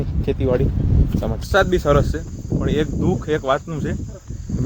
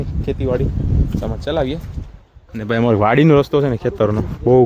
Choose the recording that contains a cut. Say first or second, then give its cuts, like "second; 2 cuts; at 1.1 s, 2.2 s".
first; 1 cut; at 1.4 s